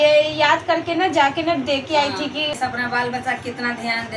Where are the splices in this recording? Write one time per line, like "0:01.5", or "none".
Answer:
0:02.5